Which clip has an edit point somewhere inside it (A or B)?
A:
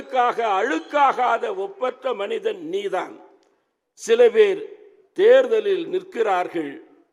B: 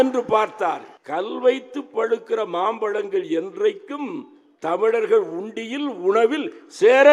B